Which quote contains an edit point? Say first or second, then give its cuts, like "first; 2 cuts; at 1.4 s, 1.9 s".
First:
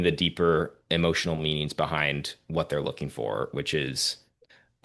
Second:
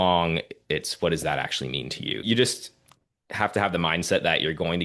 second; 1 cut; at 2.2 s